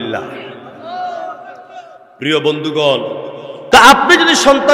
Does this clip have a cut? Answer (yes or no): yes